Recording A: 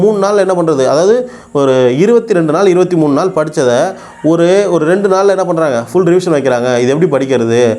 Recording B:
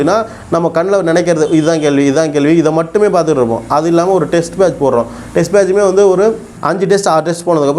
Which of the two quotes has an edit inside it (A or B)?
B